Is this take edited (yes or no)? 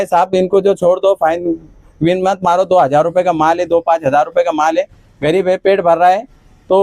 no